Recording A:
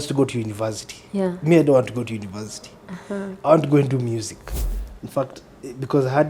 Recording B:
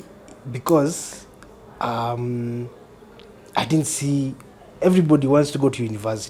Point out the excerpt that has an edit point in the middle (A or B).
A